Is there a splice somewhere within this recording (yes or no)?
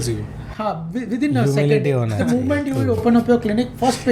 no